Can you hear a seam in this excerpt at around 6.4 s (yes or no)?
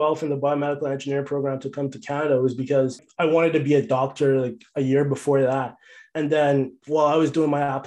no